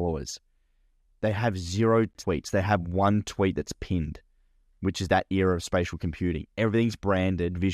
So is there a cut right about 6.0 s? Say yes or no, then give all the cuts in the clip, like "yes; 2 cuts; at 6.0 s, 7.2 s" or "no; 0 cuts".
no; 1 cut; at 2.2 s